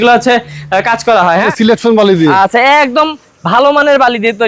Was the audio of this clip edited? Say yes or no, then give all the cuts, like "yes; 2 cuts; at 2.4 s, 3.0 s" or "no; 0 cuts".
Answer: yes; 1 cut; at 1.5 s